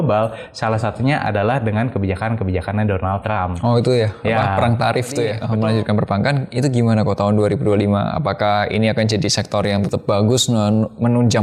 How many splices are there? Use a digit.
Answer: 2